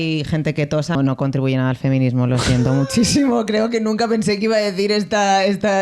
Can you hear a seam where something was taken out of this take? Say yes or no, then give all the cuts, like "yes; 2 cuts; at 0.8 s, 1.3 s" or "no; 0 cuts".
yes; 1 cut; at 1.0 s